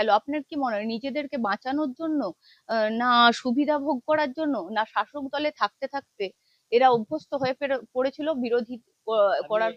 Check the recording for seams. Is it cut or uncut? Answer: uncut